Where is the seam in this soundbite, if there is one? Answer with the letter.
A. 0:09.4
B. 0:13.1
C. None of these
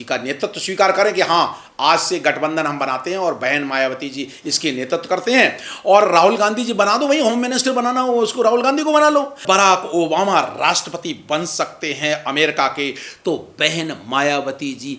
A